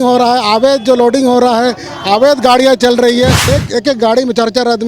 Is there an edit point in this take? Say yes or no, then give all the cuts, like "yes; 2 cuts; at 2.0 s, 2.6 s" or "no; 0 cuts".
yes; 1 cut; at 3.5 s